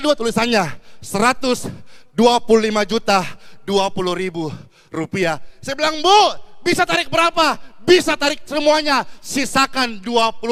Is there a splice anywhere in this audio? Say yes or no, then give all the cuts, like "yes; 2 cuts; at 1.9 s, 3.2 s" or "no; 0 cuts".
no; 0 cuts